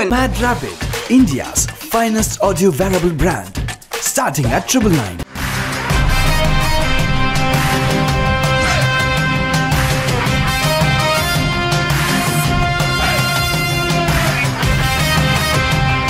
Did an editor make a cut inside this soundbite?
no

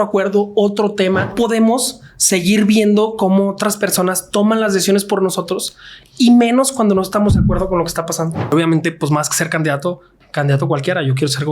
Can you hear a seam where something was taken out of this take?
yes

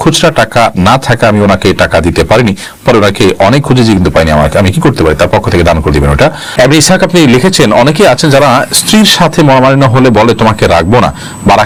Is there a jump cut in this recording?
no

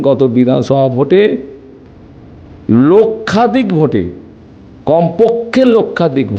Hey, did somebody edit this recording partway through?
no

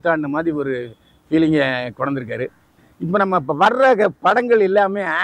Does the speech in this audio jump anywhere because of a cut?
no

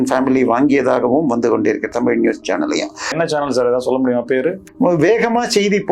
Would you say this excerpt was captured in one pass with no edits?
no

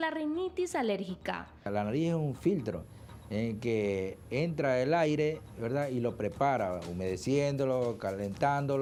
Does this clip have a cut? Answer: no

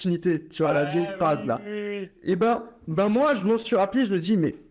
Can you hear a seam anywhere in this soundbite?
no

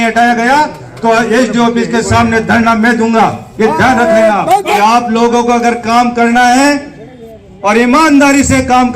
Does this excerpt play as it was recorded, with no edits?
no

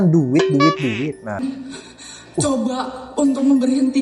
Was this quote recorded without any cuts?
no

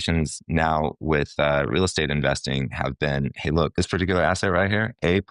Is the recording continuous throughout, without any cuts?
yes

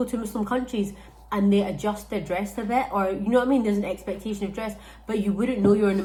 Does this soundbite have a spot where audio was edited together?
no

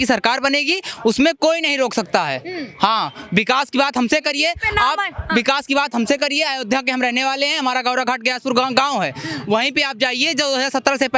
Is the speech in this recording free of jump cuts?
yes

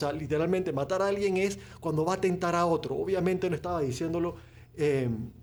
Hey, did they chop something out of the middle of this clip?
no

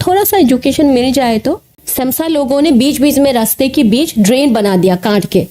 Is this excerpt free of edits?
no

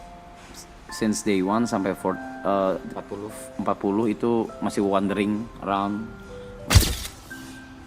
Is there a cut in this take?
yes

